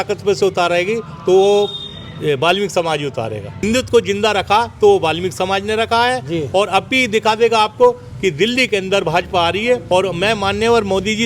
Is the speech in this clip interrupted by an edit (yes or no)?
yes